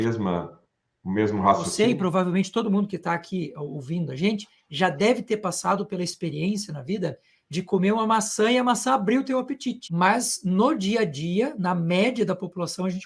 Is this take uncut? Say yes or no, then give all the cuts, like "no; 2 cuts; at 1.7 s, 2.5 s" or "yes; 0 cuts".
no; 2 cuts; at 1.7 s, 9.8 s